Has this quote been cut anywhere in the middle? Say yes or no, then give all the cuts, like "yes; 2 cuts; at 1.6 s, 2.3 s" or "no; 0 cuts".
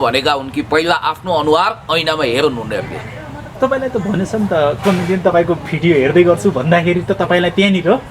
no; 0 cuts